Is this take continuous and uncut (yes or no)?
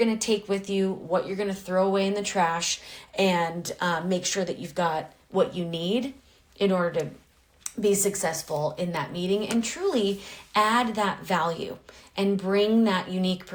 yes